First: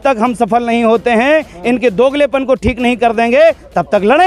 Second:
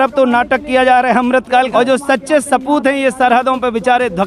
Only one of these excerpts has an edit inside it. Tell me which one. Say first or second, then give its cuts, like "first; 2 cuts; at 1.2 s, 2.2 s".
second; 1 cut; at 1.7 s